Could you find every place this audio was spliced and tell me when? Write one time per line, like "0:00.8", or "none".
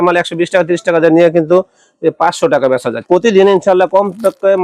0:03.0